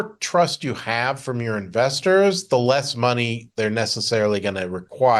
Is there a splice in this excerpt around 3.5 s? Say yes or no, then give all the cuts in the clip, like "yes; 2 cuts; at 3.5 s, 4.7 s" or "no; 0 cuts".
no; 0 cuts